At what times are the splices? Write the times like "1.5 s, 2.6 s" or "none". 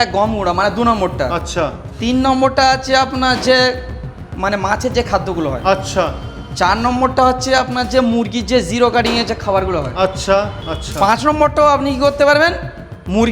10.6 s